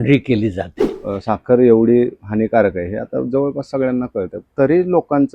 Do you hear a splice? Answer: yes; 1 cut; at 1.0 s

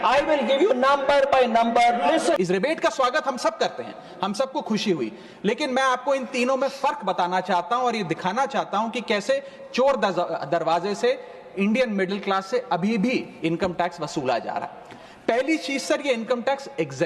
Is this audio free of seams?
no; 1 cut; at 2.4 s

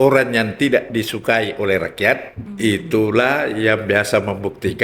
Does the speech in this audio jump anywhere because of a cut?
yes; 1 cut; at 2.4 s

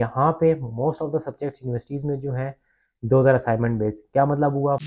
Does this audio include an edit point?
no; 0 cuts

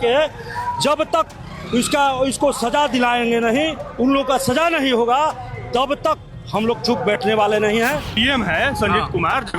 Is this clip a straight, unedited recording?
no; 1 cut; at 8.1 s

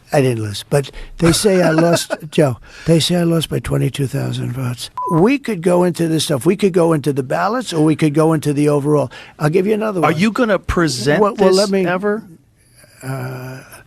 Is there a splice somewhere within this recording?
yes; 1 cut; at 4.9 s

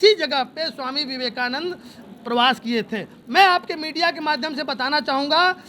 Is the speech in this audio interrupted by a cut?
no; 0 cuts

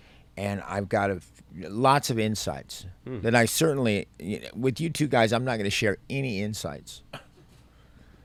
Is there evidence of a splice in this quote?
no; 0 cuts

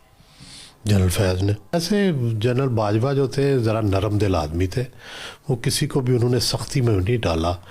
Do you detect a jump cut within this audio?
yes; 1 cut; at 1.7 s

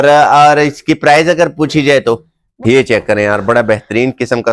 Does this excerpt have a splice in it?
yes; 1 cut; at 2.4 s

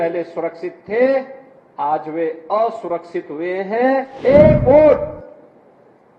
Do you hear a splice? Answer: yes; 1 cut; at 4.1 s

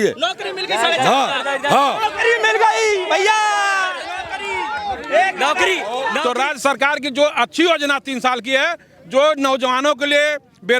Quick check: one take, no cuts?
no; 1 cut; at 6.2 s

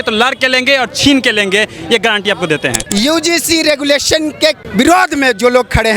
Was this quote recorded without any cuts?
no; 2 cuts; at 2.8 s, 4.6 s

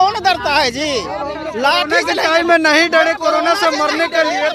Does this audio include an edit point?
no; 0 cuts

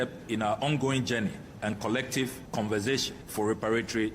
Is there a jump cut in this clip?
yes; 2 cuts; at 2.4 s, 3.2 s

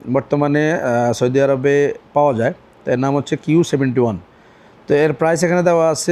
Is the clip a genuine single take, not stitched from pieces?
yes; 0 cuts

